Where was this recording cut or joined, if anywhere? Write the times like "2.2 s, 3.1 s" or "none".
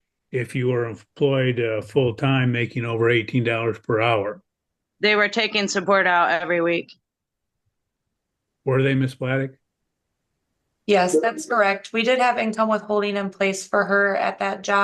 none